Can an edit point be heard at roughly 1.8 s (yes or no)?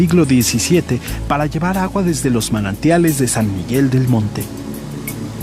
yes